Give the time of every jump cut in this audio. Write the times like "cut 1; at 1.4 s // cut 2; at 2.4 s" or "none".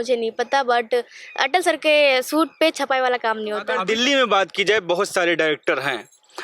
cut 1; at 3.7 s

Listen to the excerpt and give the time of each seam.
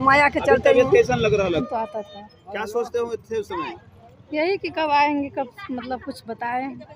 cut 1; at 1.6 s

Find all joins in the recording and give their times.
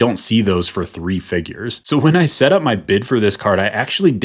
cut 1; at 1.7 s

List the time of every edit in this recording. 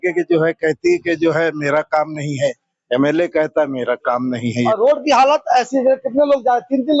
cut 1; at 4.5 s

